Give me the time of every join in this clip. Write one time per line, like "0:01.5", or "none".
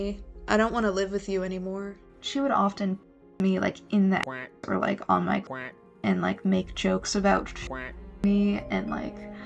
0:02.0